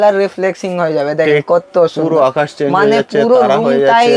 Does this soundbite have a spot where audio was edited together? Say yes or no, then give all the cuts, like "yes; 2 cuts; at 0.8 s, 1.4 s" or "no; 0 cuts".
no; 0 cuts